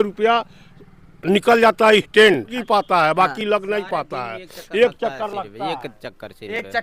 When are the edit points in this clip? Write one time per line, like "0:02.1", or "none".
0:02.6